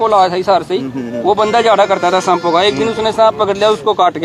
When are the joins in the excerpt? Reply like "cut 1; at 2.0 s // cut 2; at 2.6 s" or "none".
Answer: none